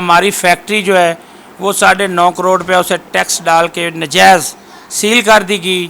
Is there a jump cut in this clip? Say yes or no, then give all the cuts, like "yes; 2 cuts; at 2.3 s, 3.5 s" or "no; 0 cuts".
no; 0 cuts